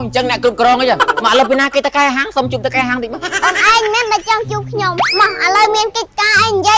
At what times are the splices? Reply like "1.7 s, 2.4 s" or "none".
1.2 s, 3.1 s, 5.0 s